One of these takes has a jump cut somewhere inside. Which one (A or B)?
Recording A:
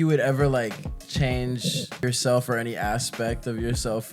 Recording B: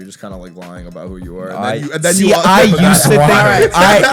A